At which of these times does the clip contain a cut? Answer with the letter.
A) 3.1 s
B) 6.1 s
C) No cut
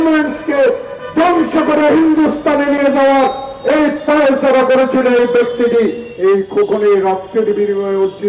B